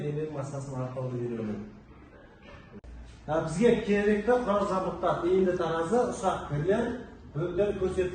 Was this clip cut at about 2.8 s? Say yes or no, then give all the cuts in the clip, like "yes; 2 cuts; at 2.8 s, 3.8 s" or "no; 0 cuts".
yes; 1 cut; at 2.8 s